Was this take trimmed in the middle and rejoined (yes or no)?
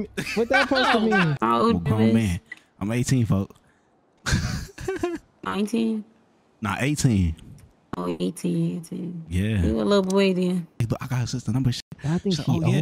yes